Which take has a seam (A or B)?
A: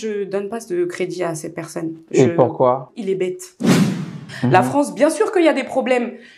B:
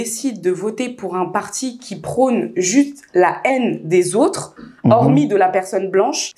A